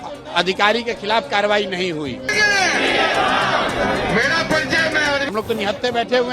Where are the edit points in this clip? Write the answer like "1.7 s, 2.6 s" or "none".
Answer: 2.3 s, 5.3 s